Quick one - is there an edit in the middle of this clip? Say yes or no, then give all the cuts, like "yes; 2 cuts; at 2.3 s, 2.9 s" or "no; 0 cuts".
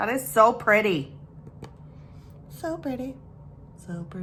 no; 0 cuts